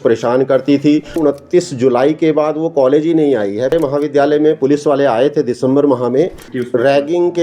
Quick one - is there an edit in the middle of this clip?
yes; 3 cuts; at 1.2 s, 3.7 s, 6.5 s

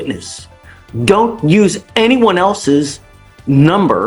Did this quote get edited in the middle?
no; 0 cuts

